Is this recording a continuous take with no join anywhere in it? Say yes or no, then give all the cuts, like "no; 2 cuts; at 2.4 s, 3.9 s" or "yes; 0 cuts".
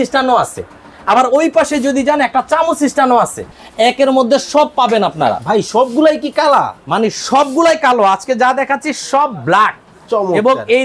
no; 1 cut; at 3.5 s